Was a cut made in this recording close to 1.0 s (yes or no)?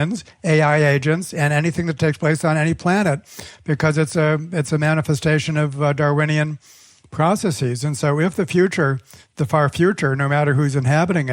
no